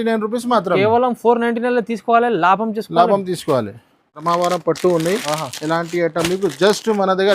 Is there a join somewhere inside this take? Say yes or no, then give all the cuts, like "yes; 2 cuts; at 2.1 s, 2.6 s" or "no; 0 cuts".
yes; 1 cut; at 4.2 s